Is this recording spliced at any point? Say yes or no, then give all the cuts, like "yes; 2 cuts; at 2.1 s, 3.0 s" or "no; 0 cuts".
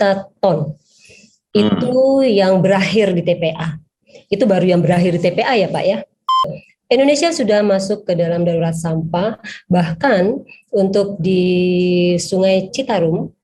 yes; 1 cut; at 6.5 s